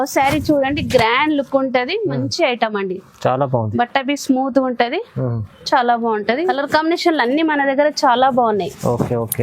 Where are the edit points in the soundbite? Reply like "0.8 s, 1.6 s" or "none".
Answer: 6.5 s